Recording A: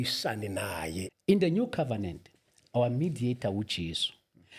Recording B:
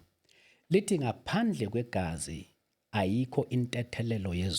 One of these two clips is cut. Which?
A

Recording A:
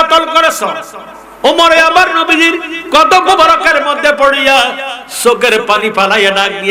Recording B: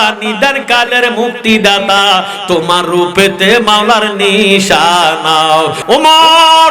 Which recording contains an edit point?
B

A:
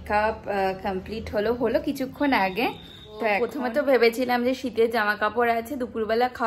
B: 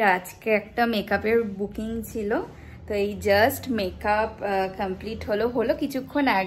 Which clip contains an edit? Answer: A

